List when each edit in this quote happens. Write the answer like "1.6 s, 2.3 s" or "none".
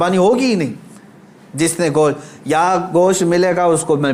none